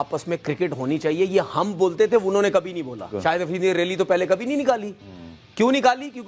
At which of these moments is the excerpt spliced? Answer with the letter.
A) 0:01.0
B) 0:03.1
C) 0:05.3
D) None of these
B